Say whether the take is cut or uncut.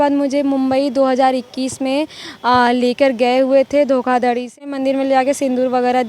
cut